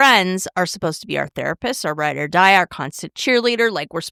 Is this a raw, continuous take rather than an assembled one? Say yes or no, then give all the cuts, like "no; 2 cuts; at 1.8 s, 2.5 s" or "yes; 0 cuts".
yes; 0 cuts